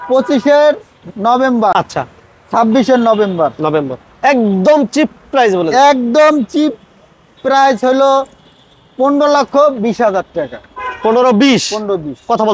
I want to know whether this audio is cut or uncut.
uncut